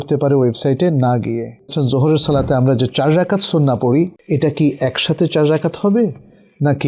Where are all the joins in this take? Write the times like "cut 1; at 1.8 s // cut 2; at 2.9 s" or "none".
cut 1; at 1.7 s // cut 2; at 4.2 s